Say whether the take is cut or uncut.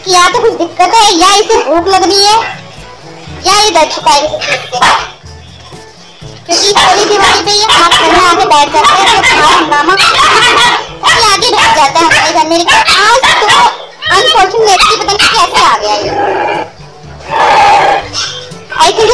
uncut